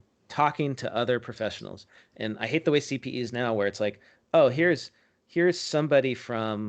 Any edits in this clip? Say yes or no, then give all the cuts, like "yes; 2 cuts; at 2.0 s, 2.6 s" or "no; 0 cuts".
no; 0 cuts